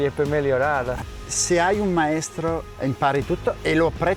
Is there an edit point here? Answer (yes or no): yes